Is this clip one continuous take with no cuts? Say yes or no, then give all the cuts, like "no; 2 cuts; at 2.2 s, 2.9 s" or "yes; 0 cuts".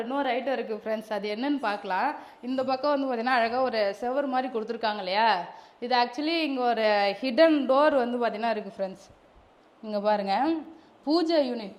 yes; 0 cuts